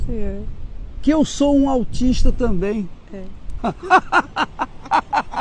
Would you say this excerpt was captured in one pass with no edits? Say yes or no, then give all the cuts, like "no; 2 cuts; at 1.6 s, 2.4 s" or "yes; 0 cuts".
no; 1 cut; at 3.6 s